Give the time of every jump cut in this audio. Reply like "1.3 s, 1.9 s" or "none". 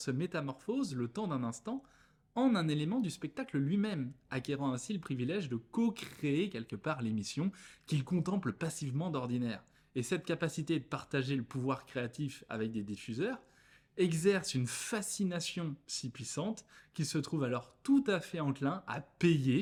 none